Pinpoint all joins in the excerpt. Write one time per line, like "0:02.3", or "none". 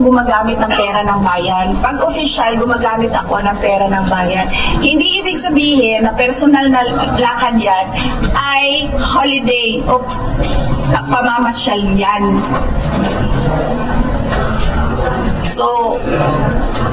none